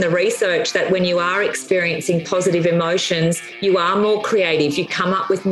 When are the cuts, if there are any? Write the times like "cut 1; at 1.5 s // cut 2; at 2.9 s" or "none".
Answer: none